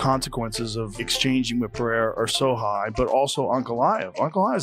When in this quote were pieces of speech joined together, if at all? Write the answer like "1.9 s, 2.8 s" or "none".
1.0 s